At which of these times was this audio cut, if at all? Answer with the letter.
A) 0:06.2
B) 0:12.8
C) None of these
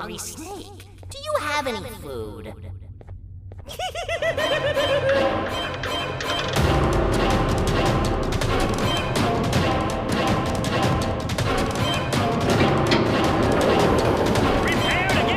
C